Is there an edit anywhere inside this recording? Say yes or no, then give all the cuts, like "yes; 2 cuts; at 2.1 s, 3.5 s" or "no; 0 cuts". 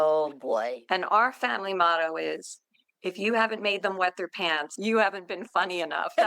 yes; 1 cut; at 4.7 s